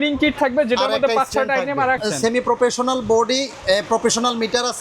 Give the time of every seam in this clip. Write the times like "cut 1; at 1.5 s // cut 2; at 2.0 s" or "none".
cut 1; at 2.0 s

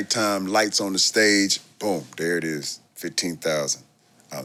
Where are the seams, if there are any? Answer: none

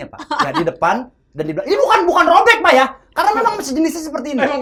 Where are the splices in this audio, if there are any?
none

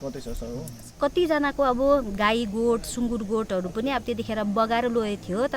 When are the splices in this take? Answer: cut 1; at 0.9 s

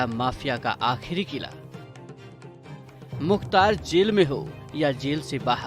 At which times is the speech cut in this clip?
none

